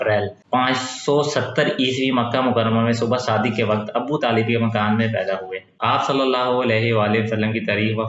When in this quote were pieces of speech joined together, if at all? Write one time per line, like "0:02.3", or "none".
0:05.7